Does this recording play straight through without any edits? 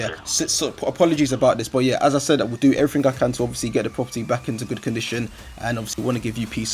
yes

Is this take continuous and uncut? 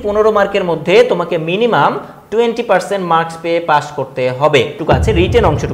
no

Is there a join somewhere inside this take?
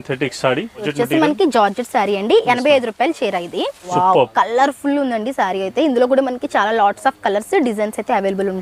yes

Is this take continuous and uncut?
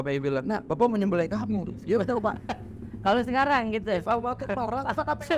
yes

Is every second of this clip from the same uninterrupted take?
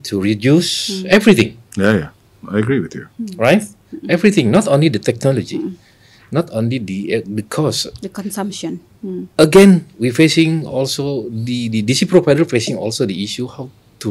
yes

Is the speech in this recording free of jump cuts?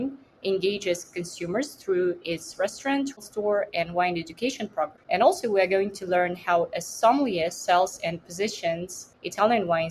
no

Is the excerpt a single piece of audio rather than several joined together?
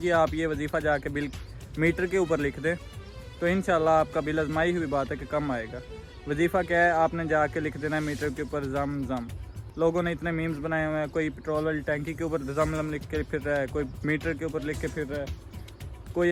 yes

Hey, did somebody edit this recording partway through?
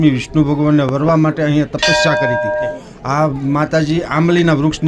yes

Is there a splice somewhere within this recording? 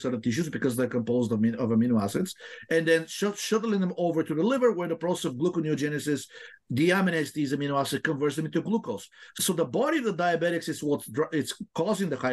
yes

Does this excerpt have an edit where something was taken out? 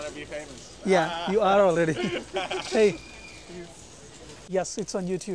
yes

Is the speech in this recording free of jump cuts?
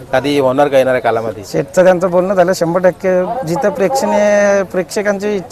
yes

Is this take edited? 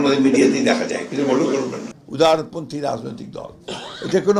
yes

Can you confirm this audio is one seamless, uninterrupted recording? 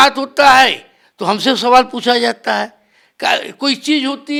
yes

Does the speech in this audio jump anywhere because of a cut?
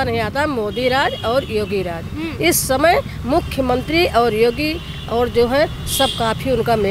no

